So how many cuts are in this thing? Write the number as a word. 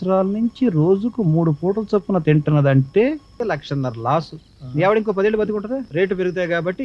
two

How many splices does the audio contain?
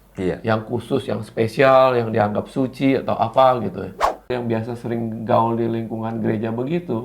one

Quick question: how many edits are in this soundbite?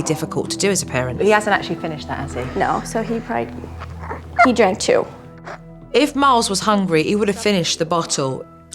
one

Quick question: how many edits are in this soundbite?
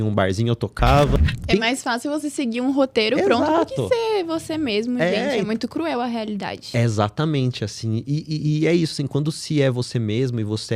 one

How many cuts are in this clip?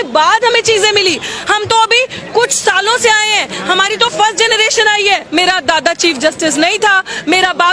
one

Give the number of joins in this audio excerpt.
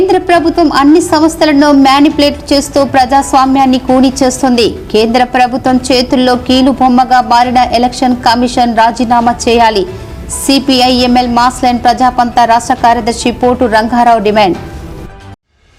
zero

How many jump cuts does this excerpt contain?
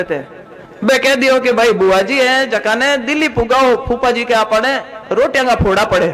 zero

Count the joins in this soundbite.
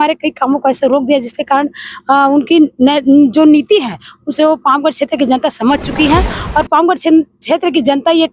zero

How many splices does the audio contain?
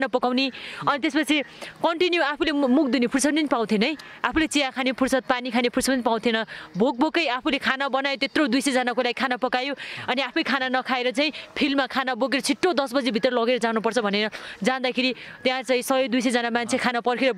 zero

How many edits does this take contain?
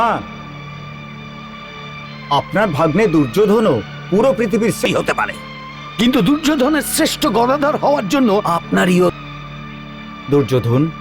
two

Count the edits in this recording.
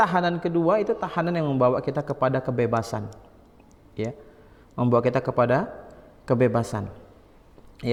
zero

